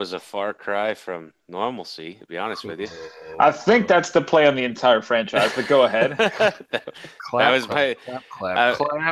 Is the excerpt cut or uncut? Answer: uncut